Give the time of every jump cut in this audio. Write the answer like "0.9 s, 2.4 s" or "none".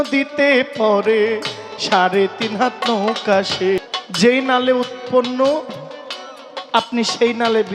3.8 s